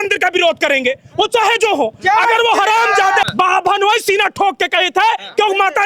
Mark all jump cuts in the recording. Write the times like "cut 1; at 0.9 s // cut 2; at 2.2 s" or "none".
cut 1; at 3.2 s